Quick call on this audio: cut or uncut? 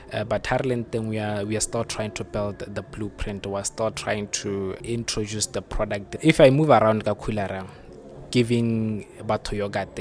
cut